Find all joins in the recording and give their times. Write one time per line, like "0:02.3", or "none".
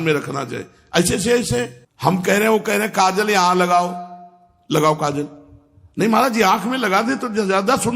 0:01.8